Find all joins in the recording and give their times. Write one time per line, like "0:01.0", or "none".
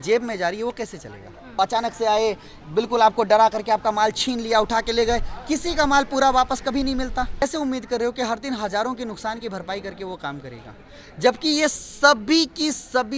0:01.5
0:07.4